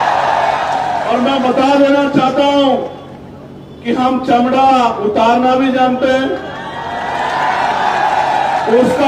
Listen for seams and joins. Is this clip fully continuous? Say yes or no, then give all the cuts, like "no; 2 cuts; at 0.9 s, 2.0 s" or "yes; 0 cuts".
yes; 0 cuts